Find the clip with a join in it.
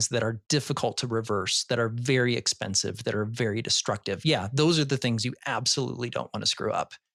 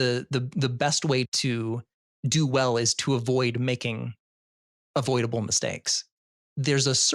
second; 1 cut; at 1.3 s

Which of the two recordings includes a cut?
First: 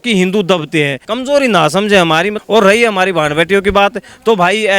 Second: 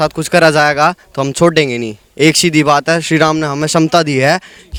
first; 2 cuts; at 1.0 s, 2.4 s

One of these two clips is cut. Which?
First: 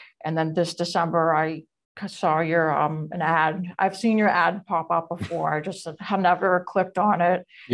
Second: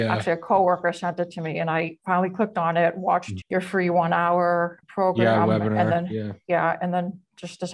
second; 2 cuts; at 3.3 s, 4.8 s

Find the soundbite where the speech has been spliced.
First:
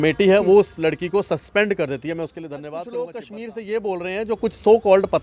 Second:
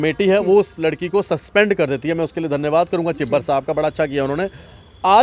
first; 1 cut; at 2.7 s

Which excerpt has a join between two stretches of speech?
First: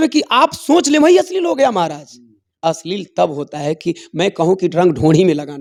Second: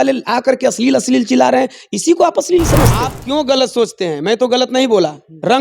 second; 1 cut; at 3.2 s

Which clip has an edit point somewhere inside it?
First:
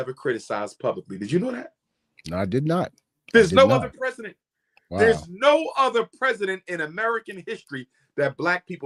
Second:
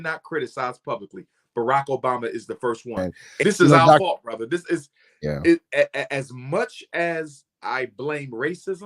second; 1 cut; at 3.2 s

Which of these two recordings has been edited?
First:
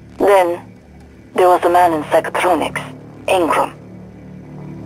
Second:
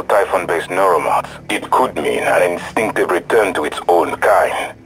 first; 1 cut; at 3.7 s

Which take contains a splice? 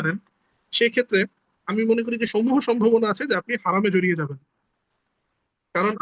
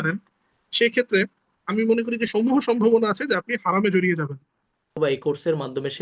second; 1 cut; at 5.0 s

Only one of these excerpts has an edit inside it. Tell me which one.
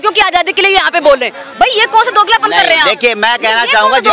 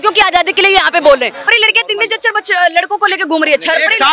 second; 1 cut; at 1.5 s

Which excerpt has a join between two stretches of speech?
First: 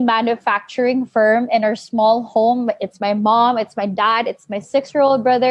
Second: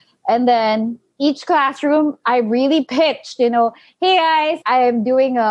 second; 1 cut; at 4.6 s

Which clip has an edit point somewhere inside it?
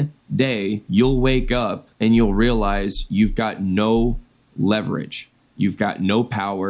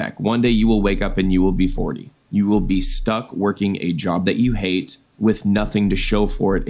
first; 2 cuts; at 0.8 s, 1.8 s

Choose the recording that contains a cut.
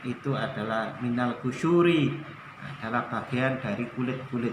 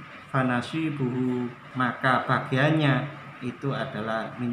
second; 1 cut; at 1.6 s

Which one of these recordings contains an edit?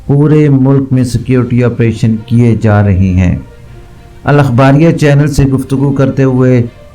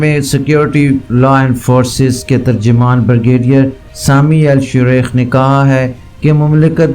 second; 1 cut; at 1.1 s

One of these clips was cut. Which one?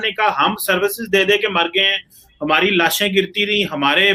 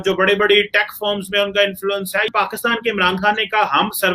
second; 1 cut; at 2.3 s

